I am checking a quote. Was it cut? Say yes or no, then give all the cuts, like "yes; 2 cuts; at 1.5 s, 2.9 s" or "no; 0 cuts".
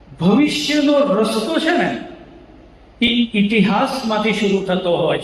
no; 0 cuts